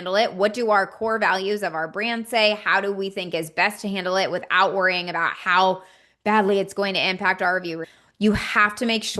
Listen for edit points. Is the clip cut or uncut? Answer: cut